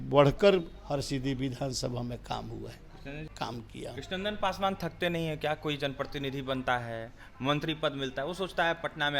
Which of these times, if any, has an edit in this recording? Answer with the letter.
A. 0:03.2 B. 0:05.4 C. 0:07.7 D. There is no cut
A